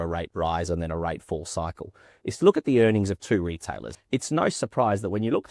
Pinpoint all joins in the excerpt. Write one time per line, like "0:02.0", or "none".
0:04.0